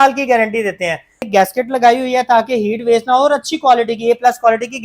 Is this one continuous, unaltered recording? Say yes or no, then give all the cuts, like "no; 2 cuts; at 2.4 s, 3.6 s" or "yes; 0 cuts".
no; 1 cut; at 1.3 s